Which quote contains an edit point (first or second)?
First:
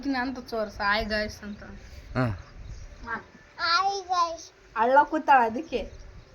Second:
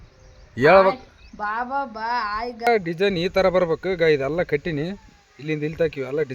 second